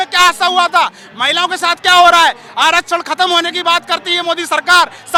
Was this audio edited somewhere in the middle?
no; 0 cuts

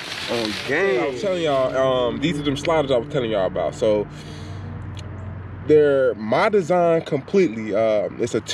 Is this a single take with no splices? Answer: no; 1 cut; at 1.2 s

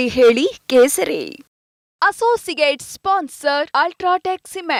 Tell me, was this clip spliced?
no; 0 cuts

